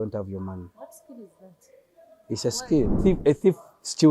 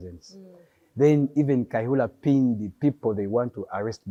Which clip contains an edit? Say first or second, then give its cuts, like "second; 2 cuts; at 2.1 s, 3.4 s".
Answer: first; 1 cut; at 3.0 s